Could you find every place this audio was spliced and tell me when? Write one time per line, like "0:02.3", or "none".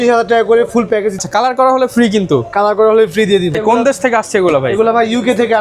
0:01.2
0:03.5